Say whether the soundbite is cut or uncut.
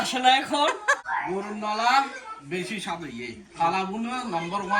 cut